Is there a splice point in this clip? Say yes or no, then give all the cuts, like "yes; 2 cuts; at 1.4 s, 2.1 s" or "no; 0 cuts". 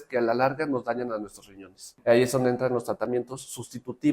yes; 1 cut; at 1.9 s